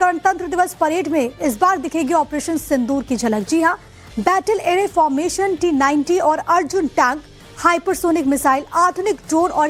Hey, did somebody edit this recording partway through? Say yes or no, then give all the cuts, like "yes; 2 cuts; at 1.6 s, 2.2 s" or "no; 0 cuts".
no; 0 cuts